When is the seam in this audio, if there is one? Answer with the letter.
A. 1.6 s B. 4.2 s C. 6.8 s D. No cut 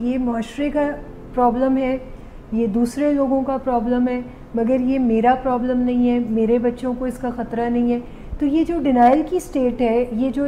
D